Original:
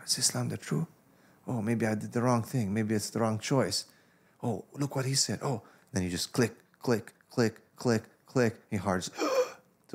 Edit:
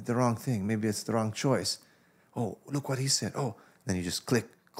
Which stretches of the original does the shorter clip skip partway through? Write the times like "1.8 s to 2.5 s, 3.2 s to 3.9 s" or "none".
none

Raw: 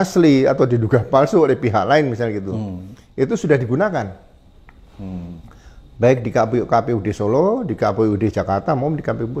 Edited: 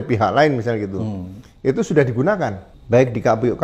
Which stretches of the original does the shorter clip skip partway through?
4.2 s to 5.8 s

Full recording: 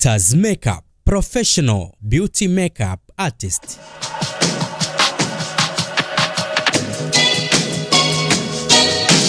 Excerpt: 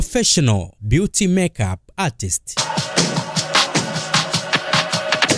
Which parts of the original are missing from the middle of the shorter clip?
3.6 s to 3.9 s

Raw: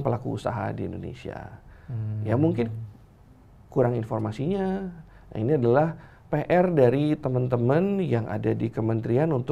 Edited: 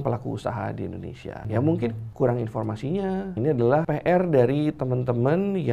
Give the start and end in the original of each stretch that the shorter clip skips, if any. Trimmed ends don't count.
1.4 s to 2.2 s, 2.8 s to 3.6 s, 5.2 s to 6.1 s

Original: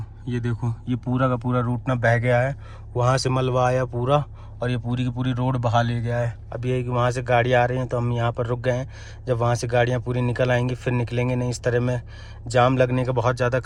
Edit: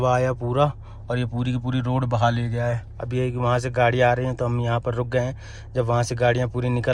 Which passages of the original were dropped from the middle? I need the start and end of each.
none

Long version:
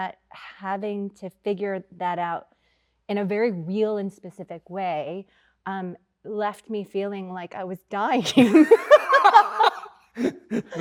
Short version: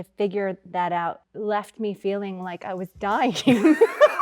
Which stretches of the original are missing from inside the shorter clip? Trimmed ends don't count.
2.5 s to 6.2 s

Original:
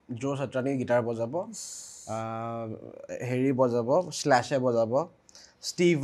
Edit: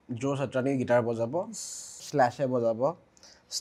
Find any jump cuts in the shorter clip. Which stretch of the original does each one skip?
2.0 s to 4.1 s

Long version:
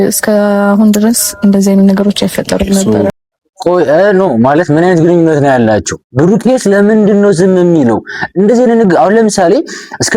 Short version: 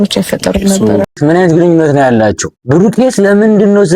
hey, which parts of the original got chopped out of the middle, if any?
3.2 s to 4.7 s

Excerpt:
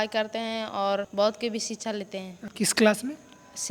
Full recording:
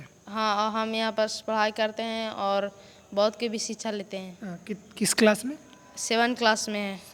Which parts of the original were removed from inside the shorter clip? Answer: 2.7 s to 3.1 s, 4.4 s to 4.8 s

